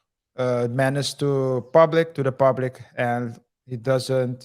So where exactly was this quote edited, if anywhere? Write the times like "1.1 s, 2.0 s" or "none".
none